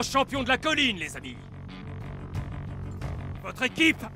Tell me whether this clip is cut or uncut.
cut